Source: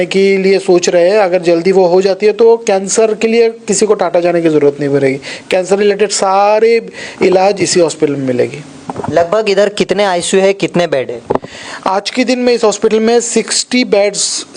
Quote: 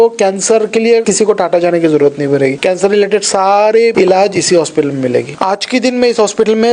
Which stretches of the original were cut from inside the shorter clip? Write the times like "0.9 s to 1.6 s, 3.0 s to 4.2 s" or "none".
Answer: 3.5 s to 3.7 s, 5.2 s to 5.4 s, 6.8 s to 7.2 s, 8.6 s to 11.8 s